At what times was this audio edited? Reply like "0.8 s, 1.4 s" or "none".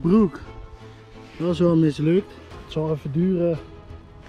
2.6 s